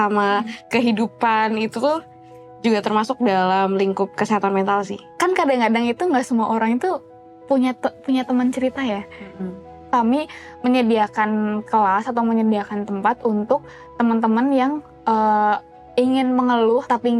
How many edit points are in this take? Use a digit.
2